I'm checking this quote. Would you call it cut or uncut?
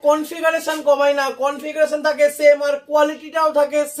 uncut